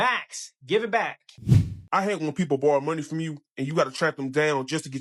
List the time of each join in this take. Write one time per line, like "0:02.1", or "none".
0:01.3